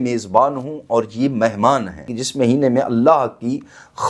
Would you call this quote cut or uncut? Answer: cut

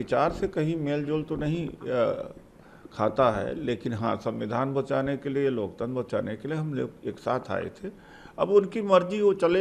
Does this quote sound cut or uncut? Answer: uncut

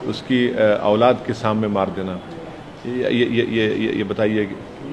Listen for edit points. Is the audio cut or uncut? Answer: uncut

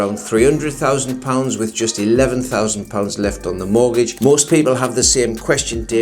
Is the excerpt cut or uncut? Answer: cut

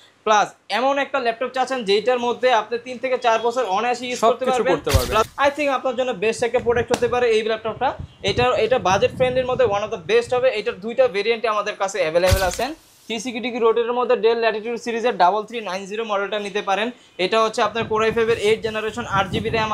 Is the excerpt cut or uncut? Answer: cut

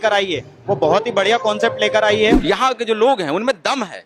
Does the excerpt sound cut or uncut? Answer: cut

